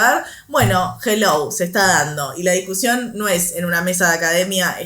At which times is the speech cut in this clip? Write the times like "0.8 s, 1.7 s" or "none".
none